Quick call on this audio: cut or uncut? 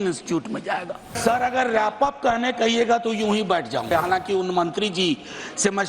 cut